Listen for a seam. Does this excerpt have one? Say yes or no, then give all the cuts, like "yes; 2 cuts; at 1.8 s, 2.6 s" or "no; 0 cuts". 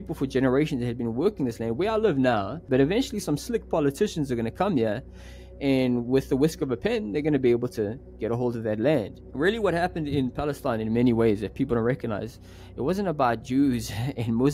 yes; 2 cuts; at 2.6 s, 9.2 s